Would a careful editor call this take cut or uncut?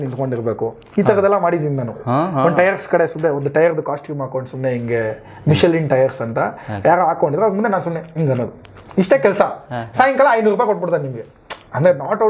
uncut